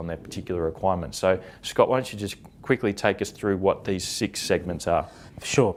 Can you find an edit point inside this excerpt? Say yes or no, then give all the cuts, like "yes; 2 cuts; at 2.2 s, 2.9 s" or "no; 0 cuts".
no; 0 cuts